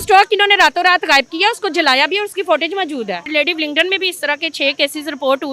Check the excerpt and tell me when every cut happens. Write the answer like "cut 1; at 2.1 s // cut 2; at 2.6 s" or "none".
cut 1; at 3.3 s